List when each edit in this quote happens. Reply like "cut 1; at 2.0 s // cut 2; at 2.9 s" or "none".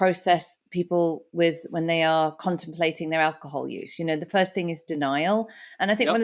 none